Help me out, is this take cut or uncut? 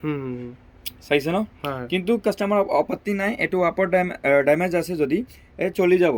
uncut